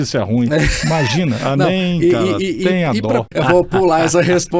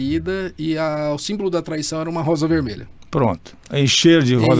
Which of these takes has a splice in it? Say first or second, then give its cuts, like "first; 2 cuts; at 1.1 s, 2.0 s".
first; 1 cut; at 3.3 s